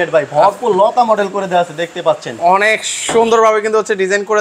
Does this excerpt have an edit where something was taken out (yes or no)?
no